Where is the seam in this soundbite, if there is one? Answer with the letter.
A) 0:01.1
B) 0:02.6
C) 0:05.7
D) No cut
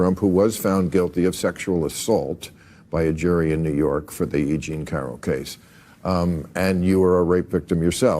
C